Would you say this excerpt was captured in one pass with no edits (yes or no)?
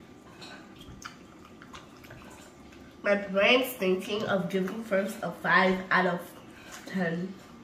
yes